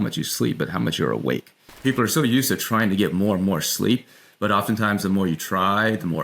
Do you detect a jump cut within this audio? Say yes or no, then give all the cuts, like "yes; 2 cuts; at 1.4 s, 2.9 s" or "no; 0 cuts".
yes; 1 cut; at 1.8 s